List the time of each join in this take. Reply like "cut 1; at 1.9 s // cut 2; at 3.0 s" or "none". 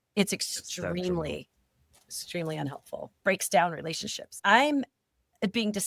cut 1; at 3.1 s // cut 2; at 4.4 s